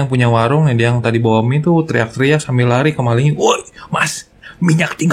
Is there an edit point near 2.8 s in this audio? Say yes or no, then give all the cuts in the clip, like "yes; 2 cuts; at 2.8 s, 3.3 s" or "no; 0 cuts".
no; 0 cuts